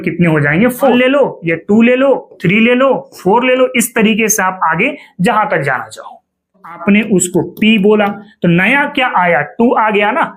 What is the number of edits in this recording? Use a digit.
2